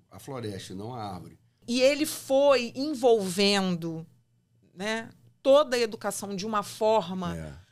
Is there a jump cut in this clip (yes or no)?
yes